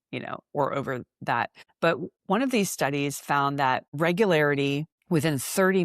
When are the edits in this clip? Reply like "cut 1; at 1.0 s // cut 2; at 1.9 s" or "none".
cut 1; at 2.0 s // cut 2; at 3.9 s // cut 3; at 4.9 s